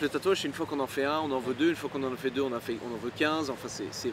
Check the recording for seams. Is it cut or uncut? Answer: uncut